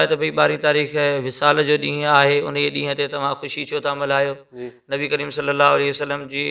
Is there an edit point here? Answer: no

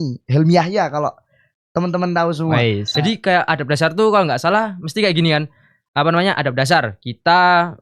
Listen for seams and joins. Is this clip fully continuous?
no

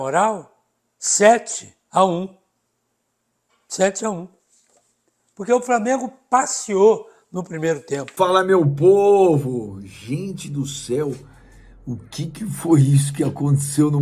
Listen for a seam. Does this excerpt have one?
yes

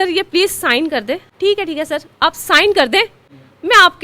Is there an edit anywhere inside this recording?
yes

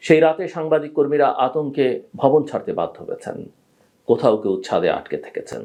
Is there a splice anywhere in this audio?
no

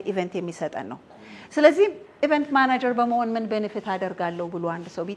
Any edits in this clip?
no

